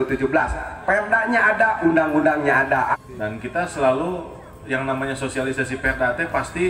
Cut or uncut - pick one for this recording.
cut